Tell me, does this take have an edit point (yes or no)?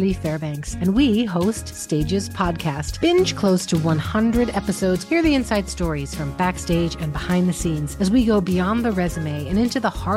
no